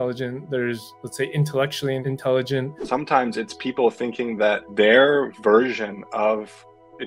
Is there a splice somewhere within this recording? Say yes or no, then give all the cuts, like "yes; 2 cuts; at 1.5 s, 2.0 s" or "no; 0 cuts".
yes; 1 cut; at 2.8 s